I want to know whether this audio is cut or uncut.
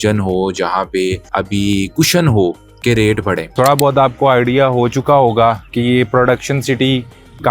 cut